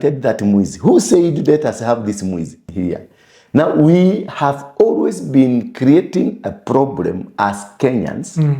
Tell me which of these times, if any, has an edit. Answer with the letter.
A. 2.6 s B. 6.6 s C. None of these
A